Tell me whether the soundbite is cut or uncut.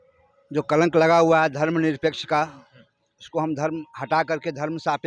uncut